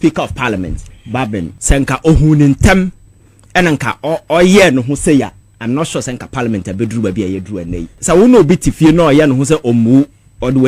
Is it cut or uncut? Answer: cut